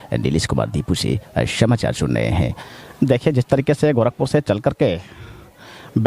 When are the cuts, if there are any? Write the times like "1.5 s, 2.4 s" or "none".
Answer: 2.6 s

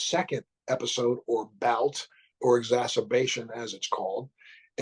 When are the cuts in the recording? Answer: none

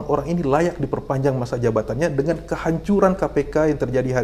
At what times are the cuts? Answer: none

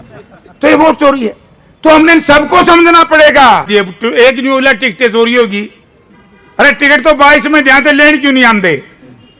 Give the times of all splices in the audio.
3.7 s

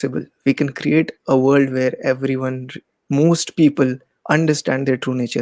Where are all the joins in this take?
none

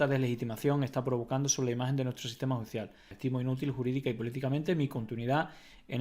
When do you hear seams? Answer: 3.0 s

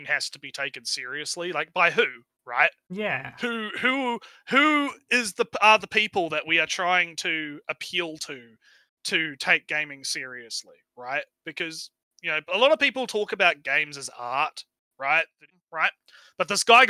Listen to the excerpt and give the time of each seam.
15.5 s

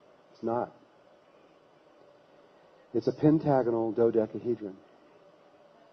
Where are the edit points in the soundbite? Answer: 1.2 s

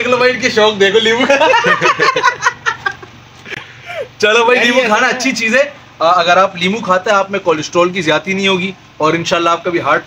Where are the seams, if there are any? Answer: none

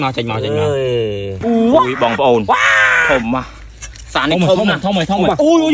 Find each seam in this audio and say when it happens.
1.4 s

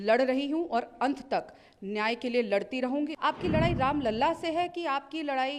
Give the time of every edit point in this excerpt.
3.1 s

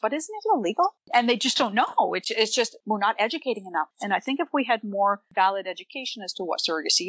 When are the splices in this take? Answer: 1.1 s, 3.9 s

